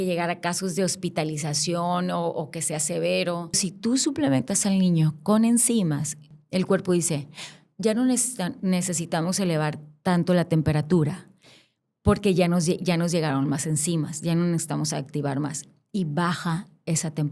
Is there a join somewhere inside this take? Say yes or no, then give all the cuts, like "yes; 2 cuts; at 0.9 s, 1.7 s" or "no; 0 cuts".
yes; 2 cuts; at 3.7 s, 6.3 s